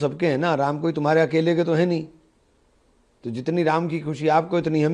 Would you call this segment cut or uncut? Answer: uncut